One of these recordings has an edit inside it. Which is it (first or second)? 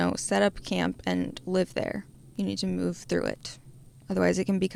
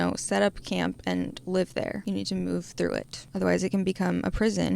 second